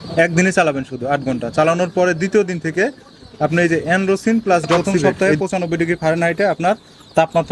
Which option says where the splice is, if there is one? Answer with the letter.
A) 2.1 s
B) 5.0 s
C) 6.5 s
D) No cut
B